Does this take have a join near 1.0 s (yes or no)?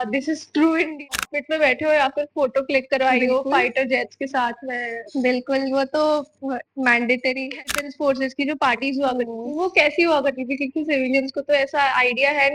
yes